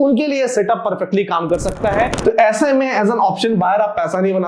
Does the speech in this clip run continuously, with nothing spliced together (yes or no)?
no